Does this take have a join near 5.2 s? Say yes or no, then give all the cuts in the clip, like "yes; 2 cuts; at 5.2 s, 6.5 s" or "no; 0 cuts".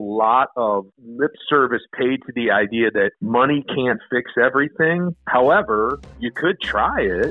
yes; 4 cuts; at 1.0 s, 3.2 s, 5.2 s, 6.2 s